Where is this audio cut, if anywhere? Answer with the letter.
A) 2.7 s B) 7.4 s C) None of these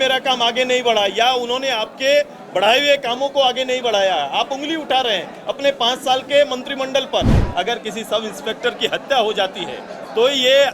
B